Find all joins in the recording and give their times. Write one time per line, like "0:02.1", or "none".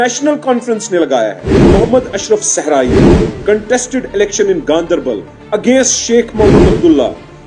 0:01.6